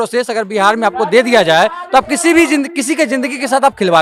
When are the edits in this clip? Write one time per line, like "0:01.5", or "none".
none